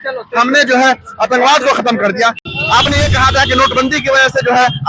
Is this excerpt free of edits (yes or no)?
no